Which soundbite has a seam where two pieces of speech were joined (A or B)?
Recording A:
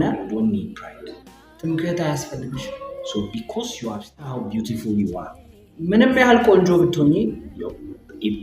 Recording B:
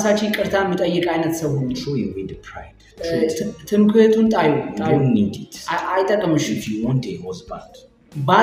A